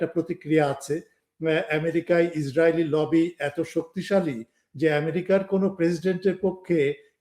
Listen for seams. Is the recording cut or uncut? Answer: cut